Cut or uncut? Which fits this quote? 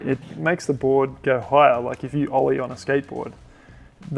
uncut